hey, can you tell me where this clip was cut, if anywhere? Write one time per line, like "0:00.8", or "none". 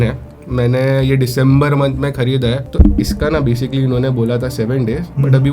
0:02.7